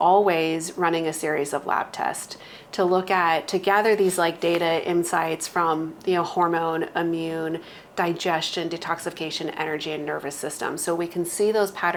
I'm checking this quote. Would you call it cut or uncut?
uncut